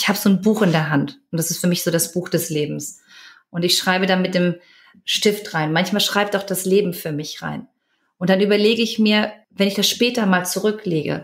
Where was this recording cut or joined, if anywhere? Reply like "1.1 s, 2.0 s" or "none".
9.4 s